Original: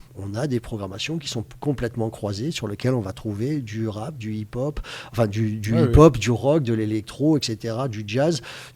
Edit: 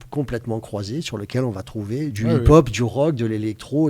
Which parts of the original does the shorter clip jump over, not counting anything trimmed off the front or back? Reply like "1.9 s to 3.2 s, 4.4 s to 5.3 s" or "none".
3.6 s to 5.6 s

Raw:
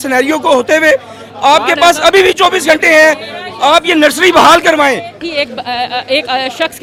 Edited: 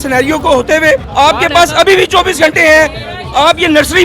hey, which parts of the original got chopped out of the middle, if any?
1.1 s to 1.3 s

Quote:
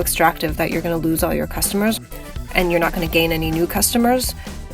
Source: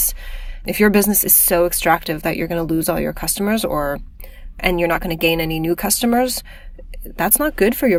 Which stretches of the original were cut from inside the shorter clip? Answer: 3.6 s to 4.1 s

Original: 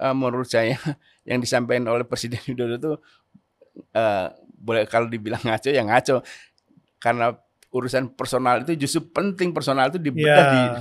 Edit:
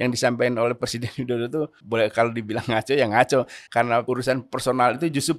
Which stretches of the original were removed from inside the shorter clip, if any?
3.1 s to 4.5 s, 6.6 s to 7.5 s

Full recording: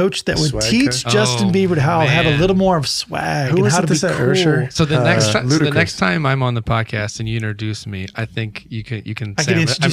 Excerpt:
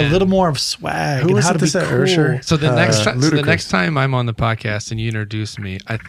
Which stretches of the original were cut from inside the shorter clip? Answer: none

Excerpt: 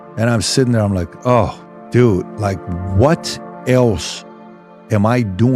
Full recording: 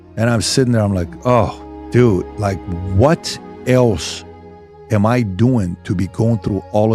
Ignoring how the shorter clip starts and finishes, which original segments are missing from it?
none

